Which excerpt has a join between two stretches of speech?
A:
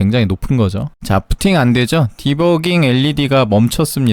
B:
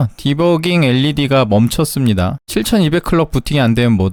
A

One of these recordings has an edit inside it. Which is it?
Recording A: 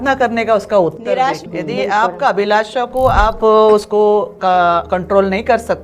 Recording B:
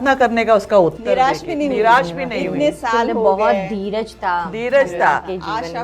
A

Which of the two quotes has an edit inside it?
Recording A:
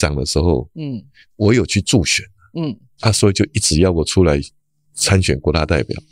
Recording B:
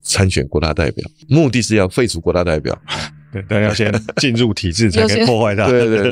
A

